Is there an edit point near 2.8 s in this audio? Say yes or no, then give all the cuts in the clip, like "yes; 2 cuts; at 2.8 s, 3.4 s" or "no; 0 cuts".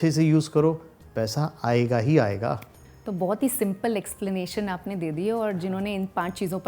no; 0 cuts